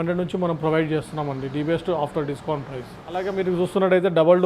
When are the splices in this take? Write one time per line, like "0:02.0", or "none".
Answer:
none